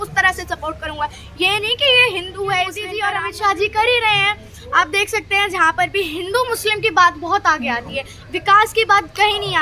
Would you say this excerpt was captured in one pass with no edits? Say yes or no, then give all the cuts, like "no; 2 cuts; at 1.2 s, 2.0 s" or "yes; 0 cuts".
no; 1 cut; at 3.0 s